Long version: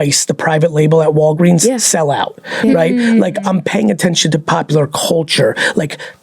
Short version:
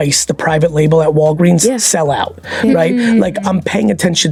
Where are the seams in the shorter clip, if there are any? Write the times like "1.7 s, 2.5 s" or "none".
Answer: none